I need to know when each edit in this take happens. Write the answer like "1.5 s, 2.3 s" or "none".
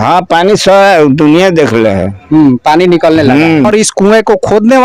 3.7 s